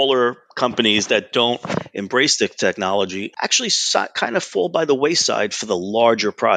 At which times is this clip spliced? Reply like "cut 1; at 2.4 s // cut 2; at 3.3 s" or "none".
none